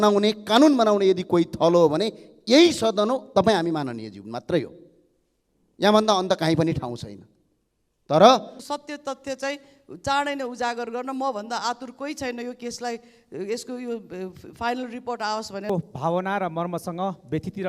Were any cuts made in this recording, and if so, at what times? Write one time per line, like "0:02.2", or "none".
0:08.6
0:15.7